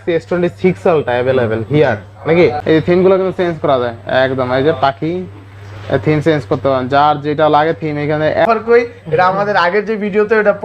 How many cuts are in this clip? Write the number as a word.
two